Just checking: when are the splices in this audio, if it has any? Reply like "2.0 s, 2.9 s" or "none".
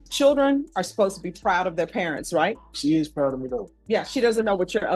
2.7 s, 3.7 s